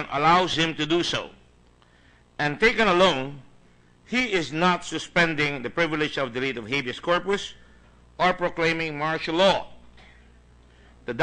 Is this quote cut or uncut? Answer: uncut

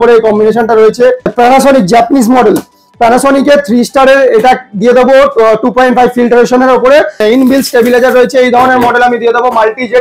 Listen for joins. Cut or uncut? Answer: cut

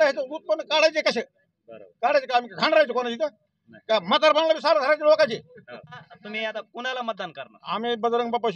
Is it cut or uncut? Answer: cut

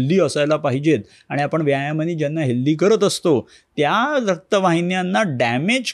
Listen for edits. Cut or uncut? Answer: uncut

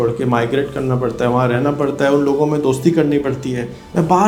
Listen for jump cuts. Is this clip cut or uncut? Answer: uncut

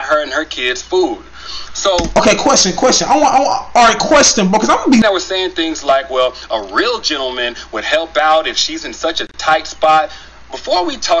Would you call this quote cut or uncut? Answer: cut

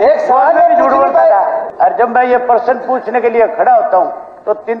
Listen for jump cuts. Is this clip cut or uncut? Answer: cut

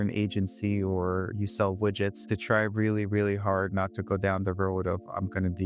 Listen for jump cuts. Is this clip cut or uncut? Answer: cut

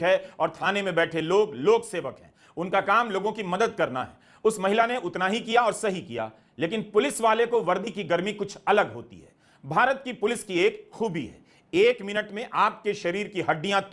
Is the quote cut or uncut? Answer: uncut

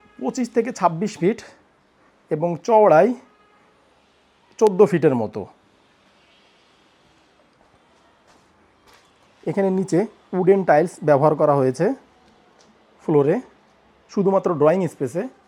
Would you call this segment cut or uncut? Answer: uncut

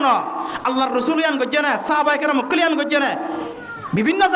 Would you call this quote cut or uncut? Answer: uncut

